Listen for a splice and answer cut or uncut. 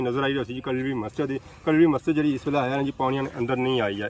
uncut